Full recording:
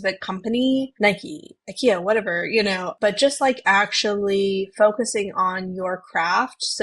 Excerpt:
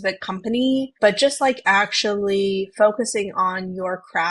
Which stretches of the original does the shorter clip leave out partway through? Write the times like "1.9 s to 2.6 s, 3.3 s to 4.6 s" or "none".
0.9 s to 2.9 s